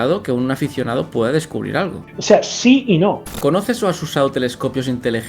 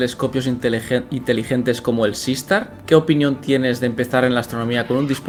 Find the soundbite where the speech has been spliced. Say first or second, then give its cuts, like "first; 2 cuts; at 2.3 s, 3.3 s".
first; 2 cuts; at 2.1 s, 3.4 s